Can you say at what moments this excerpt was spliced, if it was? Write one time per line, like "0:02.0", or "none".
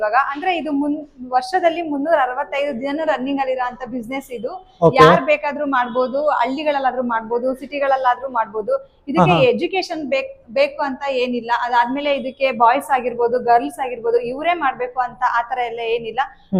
none